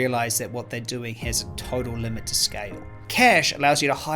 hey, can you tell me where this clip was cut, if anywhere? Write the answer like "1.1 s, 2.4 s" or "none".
3.0 s